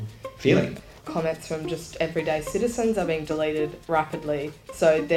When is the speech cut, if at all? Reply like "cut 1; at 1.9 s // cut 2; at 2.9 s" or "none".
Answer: cut 1; at 0.9 s // cut 2; at 3.8 s